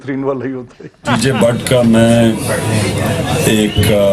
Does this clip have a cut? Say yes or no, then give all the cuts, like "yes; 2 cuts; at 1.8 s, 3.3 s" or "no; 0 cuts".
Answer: yes; 1 cut; at 1.0 s